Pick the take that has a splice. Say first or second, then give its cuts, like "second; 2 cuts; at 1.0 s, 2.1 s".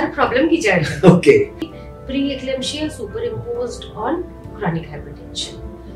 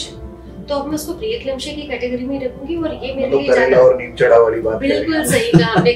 first; 1 cut; at 1.6 s